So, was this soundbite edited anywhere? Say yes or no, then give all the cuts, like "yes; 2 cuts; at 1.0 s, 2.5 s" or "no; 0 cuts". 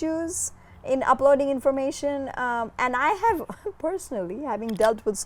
no; 0 cuts